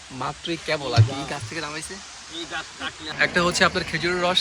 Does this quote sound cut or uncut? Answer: cut